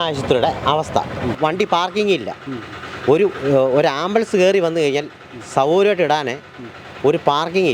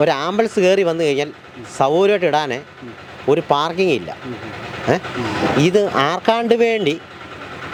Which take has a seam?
first; 1 cut; at 1.3 s

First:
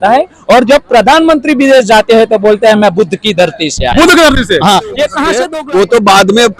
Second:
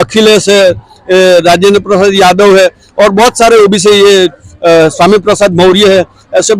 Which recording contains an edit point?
first; 1 cut; at 5.3 s

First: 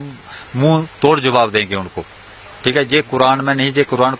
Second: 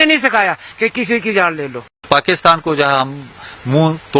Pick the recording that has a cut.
second; 1 cut; at 2.0 s

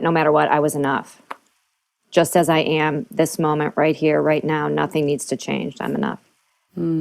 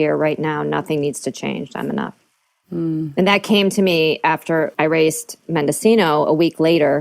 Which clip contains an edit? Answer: second; 1 cut; at 4.7 s

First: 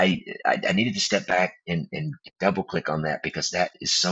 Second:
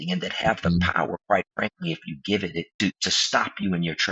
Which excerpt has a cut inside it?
second; 1 cut; at 2.7 s

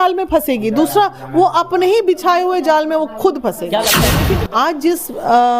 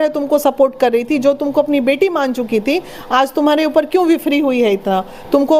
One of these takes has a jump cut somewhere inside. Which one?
first; 1 cut; at 4.2 s

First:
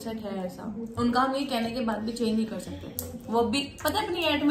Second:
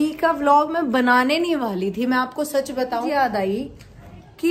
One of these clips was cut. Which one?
second; 1 cut; at 3.0 s

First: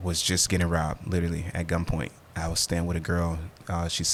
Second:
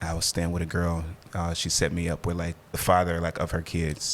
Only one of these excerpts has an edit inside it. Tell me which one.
second; 1 cut; at 2.8 s

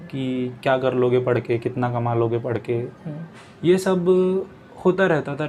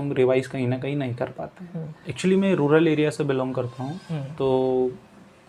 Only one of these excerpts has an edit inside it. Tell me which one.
second; 1 cut; at 2.1 s

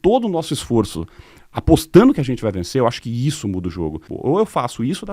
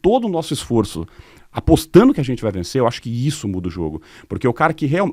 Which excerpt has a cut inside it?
first; 1 cut; at 4.1 s

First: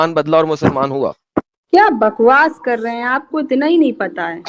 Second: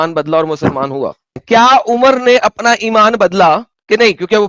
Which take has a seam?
second; 1 cut; at 1.3 s

